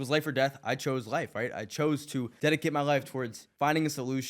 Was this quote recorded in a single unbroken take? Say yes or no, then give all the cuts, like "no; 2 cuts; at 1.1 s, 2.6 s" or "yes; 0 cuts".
no; 2 cuts; at 2.3 s, 3.4 s